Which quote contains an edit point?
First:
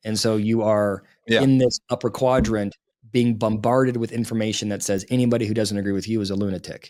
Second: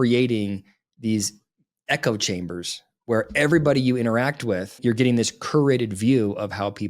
second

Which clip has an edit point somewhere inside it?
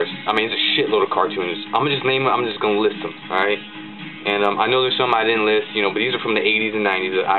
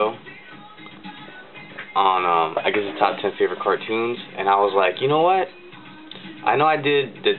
first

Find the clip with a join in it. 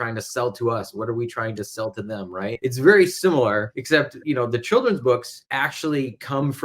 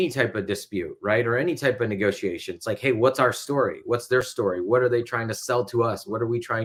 first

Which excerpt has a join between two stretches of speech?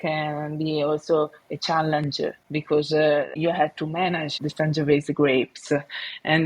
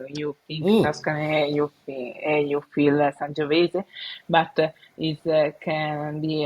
first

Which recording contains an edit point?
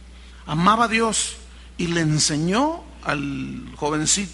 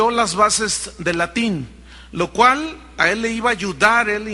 second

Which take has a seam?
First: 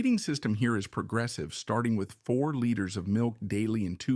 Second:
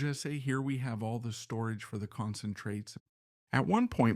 second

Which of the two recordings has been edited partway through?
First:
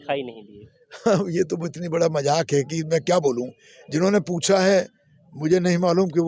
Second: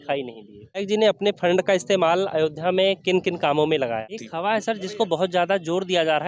second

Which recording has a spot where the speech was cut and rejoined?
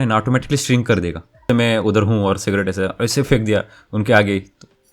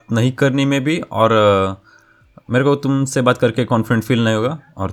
first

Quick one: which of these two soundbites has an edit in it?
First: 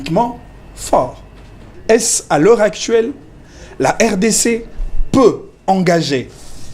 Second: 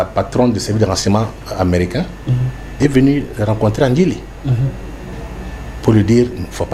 first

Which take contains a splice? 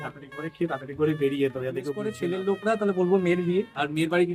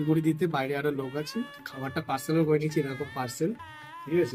first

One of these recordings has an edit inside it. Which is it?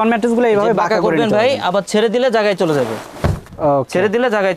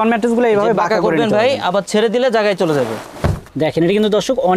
second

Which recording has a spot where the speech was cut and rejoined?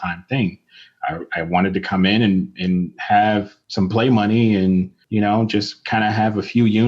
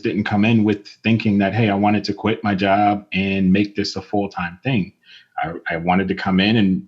first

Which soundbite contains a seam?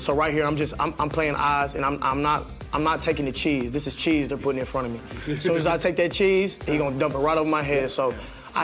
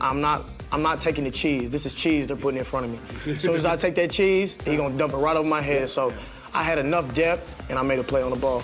second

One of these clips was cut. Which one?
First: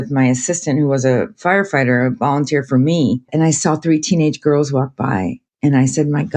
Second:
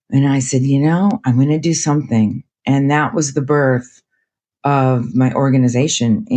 first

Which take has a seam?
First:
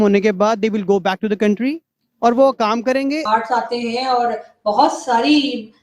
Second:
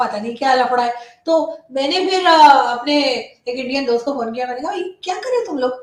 first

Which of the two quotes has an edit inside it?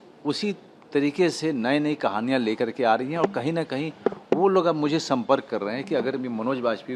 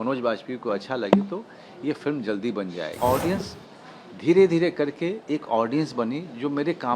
second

